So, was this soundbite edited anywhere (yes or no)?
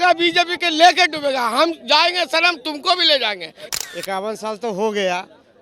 yes